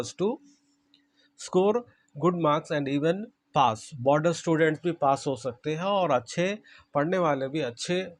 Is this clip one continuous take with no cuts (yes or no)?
yes